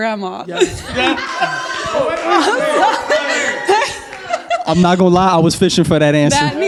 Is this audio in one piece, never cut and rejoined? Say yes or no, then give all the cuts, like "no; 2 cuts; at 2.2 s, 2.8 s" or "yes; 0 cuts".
yes; 0 cuts